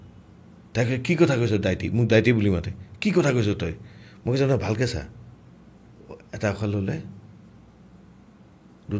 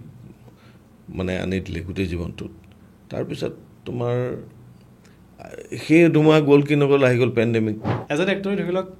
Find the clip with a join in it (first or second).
second